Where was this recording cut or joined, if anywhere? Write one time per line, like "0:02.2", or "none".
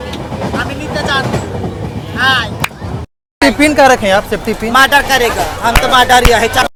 none